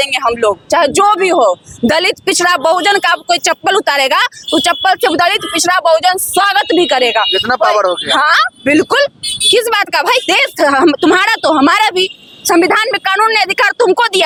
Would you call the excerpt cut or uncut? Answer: uncut